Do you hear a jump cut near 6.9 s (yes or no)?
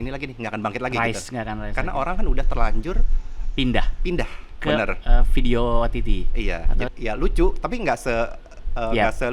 yes